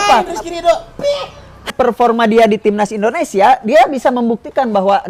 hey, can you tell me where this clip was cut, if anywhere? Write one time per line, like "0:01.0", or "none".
0:01.7